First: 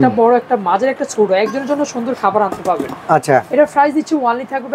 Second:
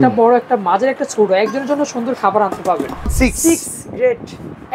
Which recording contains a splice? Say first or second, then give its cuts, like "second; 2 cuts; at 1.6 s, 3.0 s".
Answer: second; 1 cut; at 3.1 s